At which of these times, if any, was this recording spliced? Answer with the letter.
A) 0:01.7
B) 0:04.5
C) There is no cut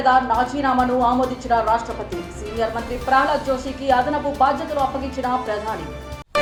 C